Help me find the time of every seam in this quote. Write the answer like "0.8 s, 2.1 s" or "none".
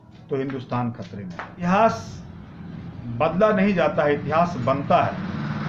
1.6 s